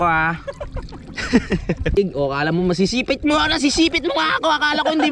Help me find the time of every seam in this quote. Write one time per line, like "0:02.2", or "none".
0:02.0